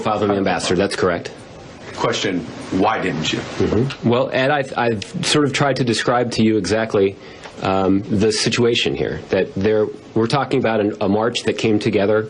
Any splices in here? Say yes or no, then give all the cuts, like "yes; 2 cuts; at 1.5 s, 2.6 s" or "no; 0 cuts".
yes; 1 cut; at 5.2 s